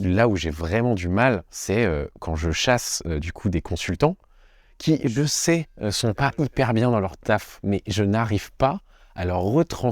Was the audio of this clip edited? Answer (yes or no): yes